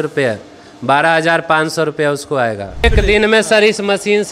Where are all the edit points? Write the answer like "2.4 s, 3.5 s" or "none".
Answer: 2.8 s